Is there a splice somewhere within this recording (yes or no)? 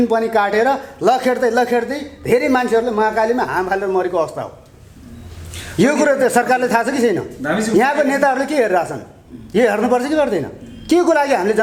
no